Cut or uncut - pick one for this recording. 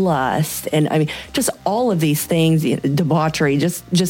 uncut